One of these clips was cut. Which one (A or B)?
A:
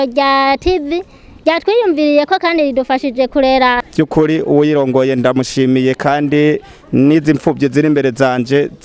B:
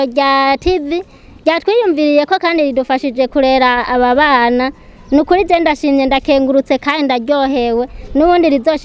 A